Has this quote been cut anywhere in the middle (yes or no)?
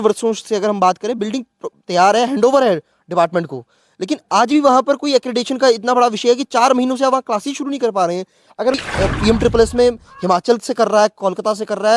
yes